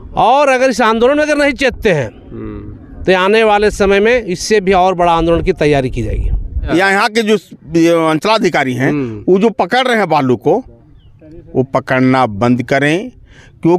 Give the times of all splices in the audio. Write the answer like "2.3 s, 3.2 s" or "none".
6.7 s